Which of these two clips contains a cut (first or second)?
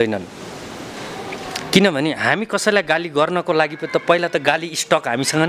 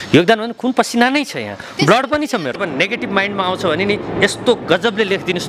second